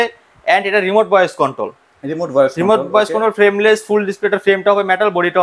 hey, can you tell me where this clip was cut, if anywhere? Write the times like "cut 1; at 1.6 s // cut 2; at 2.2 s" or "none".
none